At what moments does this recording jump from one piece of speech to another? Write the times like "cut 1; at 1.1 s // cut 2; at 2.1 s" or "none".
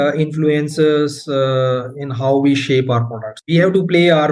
cut 1; at 3.4 s